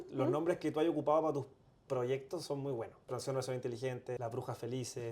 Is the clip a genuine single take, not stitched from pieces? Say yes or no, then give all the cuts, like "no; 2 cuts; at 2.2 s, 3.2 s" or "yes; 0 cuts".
no; 2 cuts; at 3.1 s, 4.2 s